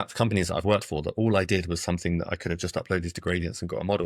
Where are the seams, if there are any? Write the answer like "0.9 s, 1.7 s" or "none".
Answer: none